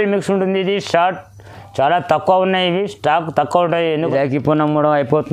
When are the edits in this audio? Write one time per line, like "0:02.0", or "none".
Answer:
0:04.0